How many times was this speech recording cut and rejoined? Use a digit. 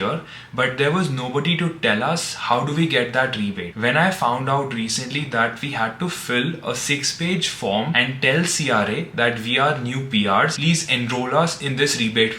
0